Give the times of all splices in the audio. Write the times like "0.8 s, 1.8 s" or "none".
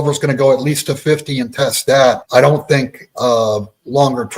none